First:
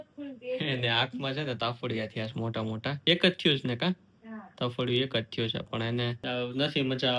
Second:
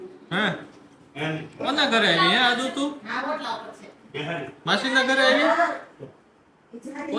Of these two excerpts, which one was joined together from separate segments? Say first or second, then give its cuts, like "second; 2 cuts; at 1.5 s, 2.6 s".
first; 2 cuts; at 3.0 s, 6.2 s